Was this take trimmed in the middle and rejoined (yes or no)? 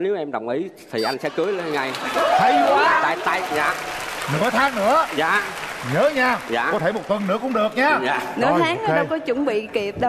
no